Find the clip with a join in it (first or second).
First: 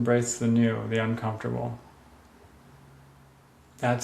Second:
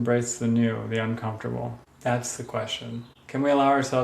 second